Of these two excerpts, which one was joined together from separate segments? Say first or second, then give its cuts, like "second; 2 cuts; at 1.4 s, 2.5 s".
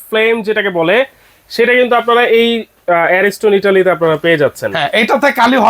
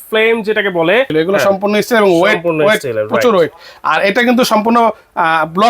second; 1 cut; at 1.1 s